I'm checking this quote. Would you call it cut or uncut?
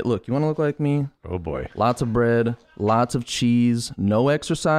cut